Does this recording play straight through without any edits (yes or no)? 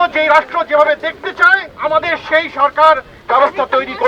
no